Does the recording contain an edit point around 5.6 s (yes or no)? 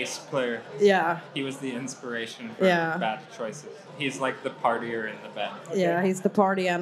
yes